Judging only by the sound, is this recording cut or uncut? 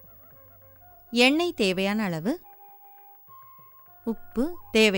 cut